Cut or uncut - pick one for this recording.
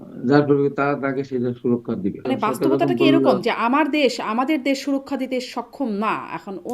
cut